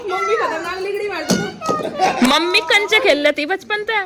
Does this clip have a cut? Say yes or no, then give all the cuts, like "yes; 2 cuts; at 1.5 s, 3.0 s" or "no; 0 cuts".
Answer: no; 0 cuts